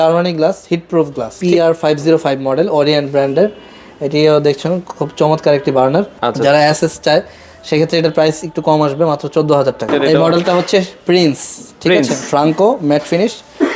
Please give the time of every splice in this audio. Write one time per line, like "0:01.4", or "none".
0:01.3
0:06.2
0:09.9